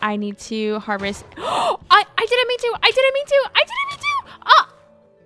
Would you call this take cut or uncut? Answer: uncut